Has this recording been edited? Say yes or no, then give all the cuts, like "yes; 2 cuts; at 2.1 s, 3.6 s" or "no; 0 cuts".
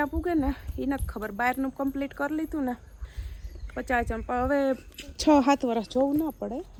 no; 0 cuts